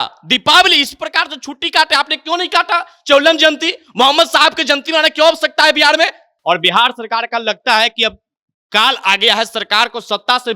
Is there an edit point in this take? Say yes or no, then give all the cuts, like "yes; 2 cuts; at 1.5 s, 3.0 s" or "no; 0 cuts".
yes; 1 cut; at 6.3 s